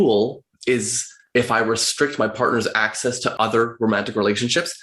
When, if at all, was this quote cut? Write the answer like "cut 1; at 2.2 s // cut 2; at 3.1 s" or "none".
cut 1; at 1.3 s // cut 2; at 3.2 s